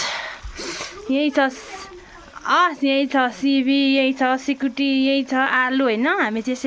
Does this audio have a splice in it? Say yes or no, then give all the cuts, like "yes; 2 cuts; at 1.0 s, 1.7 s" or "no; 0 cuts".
no; 0 cuts